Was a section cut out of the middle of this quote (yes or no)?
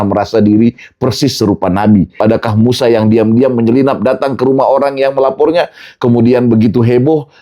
yes